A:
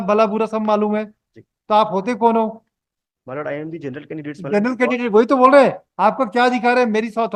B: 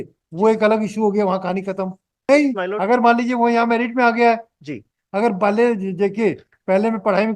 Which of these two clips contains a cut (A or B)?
B